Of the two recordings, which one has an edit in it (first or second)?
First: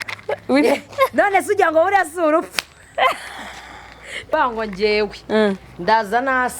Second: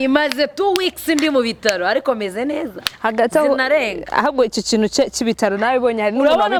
first